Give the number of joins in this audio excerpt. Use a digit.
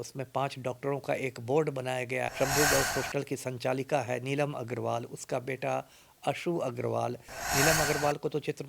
1